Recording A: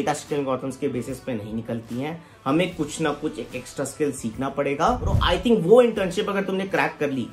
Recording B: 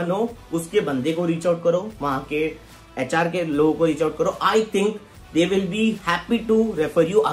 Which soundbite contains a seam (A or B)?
A